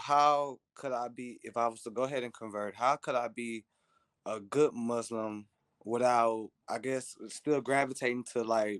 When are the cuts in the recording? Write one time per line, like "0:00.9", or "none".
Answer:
none